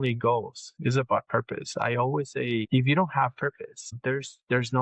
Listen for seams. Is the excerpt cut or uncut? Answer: cut